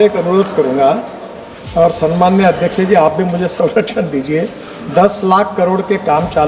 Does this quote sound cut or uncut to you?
uncut